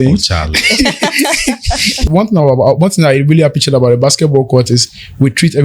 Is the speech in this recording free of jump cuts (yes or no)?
no